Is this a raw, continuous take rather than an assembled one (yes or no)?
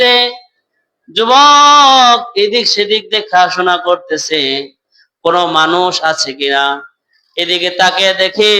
yes